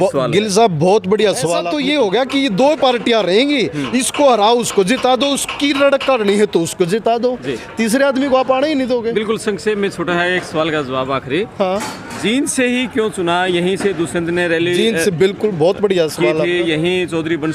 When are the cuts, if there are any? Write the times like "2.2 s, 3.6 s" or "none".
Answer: 1.6 s